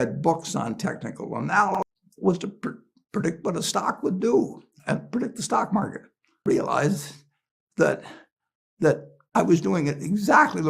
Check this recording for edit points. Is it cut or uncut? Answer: cut